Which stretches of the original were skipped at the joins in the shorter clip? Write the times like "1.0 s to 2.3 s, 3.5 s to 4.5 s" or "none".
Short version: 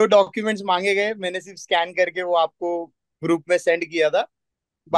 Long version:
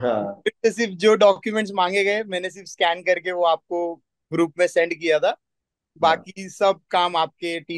none